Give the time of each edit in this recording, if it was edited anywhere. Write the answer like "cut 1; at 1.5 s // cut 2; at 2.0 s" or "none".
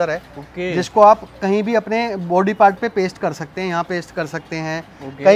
none